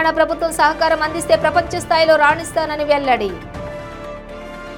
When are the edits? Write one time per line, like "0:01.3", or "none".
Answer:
none